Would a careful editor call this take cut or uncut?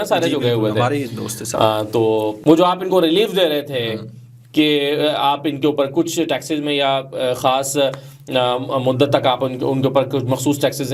cut